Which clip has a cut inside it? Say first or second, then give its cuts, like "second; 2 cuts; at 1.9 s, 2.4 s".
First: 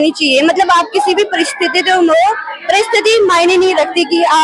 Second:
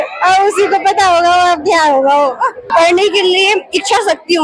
second; 1 cut; at 2.6 s